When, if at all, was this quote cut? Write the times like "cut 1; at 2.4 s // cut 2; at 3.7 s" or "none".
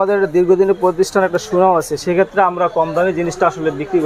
none